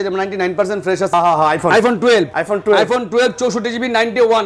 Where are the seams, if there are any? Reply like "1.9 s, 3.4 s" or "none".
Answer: 1.1 s, 2.4 s